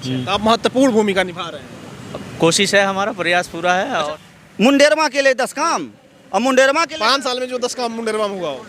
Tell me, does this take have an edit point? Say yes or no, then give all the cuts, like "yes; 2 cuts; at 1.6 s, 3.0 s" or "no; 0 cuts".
yes; 1 cut; at 4.1 s